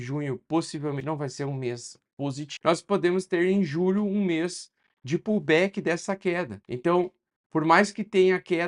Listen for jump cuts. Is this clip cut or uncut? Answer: cut